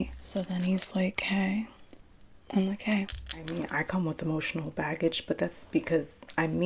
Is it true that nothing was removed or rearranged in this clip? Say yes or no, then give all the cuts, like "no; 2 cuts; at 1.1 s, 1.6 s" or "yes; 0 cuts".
no; 1 cut; at 3.4 s